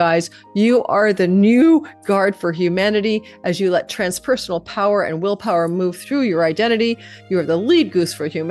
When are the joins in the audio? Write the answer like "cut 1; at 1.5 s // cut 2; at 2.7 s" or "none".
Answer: none